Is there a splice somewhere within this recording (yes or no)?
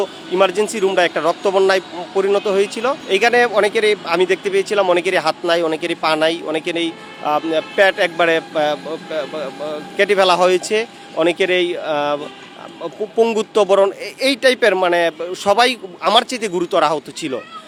no